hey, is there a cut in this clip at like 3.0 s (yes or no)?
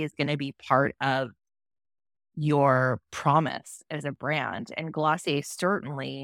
no